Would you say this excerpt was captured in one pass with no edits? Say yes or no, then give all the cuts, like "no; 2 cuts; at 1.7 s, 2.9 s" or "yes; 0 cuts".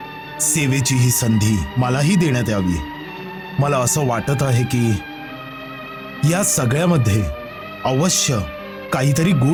yes; 0 cuts